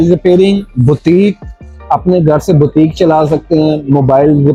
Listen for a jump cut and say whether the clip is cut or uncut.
uncut